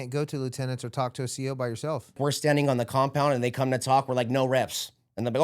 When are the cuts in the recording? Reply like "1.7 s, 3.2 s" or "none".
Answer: 2.2 s